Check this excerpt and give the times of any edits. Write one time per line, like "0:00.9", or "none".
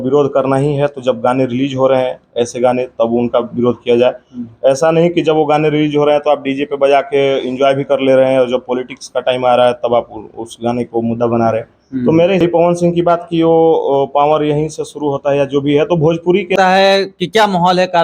0:12.4
0:16.5